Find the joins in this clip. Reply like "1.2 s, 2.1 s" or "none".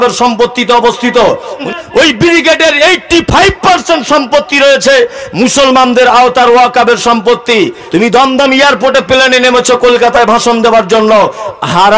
1.6 s, 7.8 s